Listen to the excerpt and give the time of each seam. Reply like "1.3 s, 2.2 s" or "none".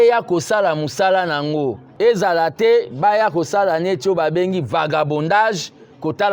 1.8 s